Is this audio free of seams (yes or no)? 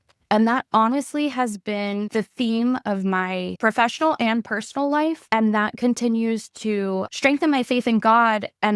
no